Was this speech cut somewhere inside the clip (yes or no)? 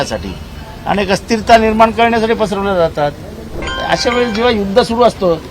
yes